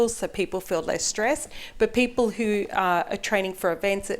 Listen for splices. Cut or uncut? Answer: uncut